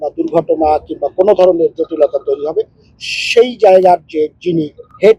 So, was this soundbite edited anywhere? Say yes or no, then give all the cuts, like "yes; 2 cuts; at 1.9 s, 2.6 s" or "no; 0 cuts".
no; 0 cuts